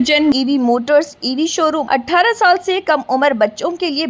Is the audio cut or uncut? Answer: cut